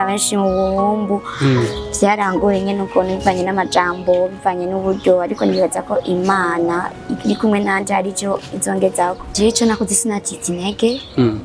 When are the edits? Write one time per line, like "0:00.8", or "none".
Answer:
0:09.3